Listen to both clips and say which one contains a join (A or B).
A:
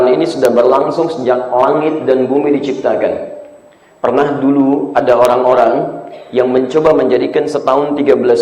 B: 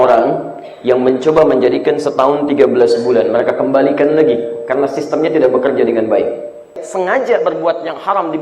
B